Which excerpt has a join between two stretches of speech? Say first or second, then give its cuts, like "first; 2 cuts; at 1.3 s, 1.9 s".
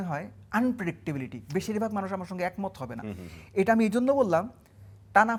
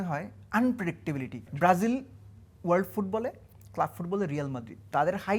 second; 1 cut; at 1.4 s